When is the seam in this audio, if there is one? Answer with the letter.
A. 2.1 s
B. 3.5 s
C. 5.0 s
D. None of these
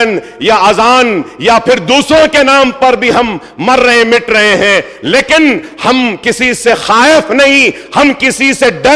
D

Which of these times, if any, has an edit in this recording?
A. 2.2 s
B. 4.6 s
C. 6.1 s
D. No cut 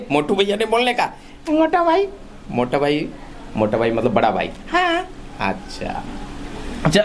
D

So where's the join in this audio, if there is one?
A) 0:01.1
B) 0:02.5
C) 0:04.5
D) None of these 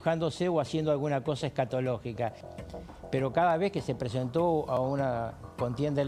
B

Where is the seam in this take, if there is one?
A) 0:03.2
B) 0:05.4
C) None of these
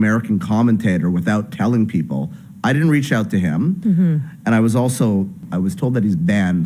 B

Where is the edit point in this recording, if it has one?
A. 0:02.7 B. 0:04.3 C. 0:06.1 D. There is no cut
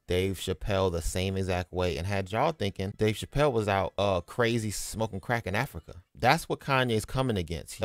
D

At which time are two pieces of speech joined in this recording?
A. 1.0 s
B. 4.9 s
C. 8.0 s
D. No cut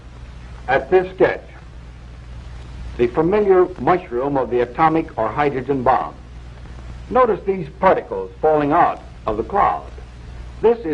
C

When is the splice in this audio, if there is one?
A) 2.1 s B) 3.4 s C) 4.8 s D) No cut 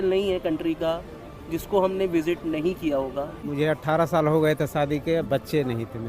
B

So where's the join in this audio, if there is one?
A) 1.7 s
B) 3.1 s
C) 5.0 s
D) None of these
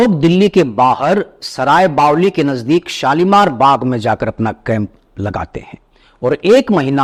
D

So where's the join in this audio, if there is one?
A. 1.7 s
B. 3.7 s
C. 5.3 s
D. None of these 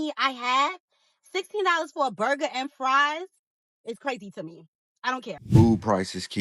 C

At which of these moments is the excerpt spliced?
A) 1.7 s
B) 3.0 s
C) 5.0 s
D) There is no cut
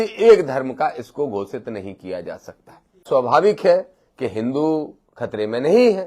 B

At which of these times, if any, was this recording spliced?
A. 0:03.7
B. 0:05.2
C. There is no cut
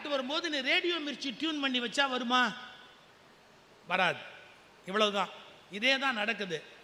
C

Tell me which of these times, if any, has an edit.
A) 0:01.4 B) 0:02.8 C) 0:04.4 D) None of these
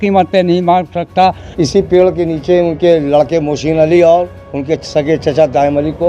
A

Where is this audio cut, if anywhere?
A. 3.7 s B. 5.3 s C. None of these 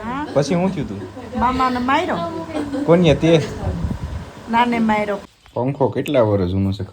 B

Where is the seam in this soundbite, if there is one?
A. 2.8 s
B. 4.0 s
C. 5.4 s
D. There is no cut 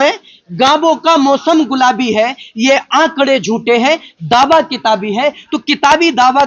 D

